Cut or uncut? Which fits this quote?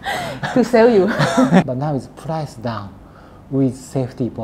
cut